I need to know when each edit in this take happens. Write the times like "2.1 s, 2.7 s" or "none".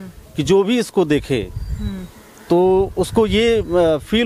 none

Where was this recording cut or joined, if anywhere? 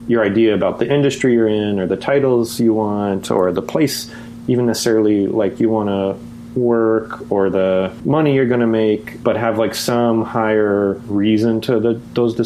none

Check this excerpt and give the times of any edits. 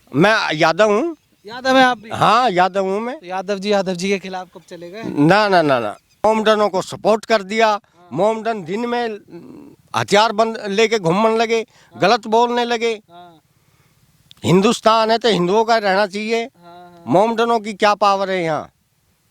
6.2 s

